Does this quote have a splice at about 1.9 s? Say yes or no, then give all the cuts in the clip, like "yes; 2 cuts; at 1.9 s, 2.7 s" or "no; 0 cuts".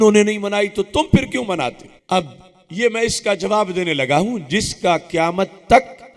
yes; 1 cut; at 1.9 s